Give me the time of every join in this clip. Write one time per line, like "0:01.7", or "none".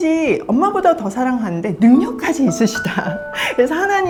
none